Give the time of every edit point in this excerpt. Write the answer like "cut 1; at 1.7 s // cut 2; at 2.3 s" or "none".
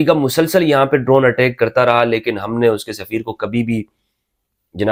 none